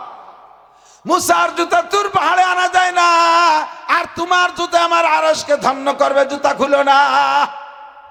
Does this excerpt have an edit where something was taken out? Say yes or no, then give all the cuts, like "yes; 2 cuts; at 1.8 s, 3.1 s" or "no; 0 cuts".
no; 0 cuts